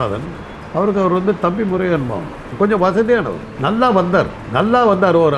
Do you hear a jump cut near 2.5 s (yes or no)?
yes